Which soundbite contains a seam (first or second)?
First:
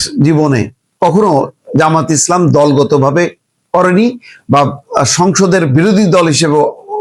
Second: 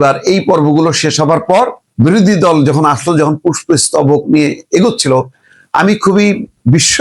second